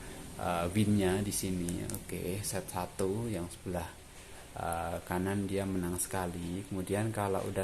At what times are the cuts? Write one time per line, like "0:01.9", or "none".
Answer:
none